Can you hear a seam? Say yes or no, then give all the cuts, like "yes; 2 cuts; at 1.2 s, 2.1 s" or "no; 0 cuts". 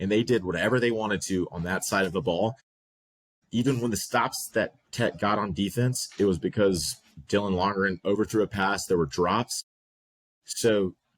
no; 0 cuts